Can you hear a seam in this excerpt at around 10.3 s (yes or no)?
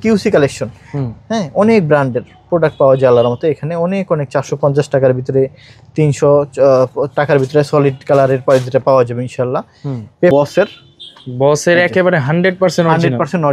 yes